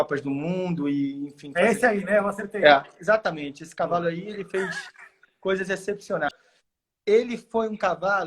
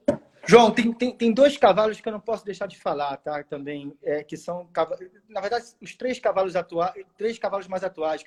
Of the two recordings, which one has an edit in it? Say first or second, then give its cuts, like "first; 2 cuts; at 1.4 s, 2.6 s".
first; 1 cut; at 6.3 s